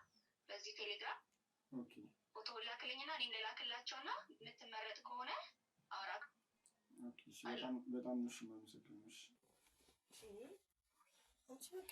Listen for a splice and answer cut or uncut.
cut